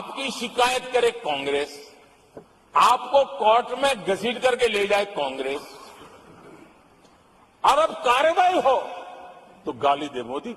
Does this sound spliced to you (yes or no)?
no